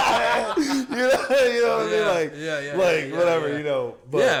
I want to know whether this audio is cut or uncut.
uncut